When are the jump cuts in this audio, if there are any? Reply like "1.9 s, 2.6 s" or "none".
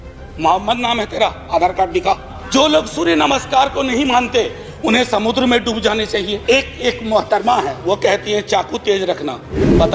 2.3 s, 6.4 s